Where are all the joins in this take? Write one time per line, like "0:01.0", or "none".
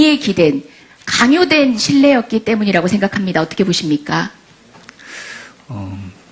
0:04.2